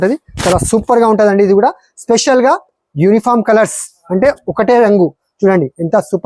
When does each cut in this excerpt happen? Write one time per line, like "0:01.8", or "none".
none